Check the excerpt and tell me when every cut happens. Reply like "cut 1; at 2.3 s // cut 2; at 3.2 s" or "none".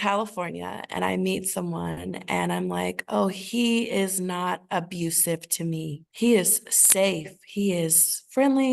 none